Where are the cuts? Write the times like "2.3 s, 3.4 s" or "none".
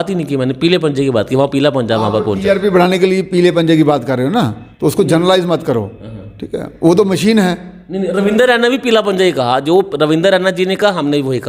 none